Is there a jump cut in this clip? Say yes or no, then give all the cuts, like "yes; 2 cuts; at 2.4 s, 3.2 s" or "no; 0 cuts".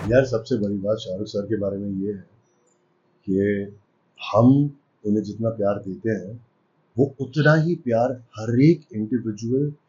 no; 0 cuts